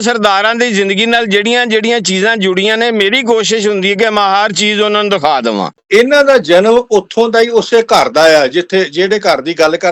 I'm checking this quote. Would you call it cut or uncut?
cut